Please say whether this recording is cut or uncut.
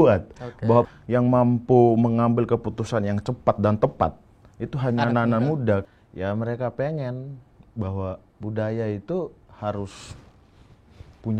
cut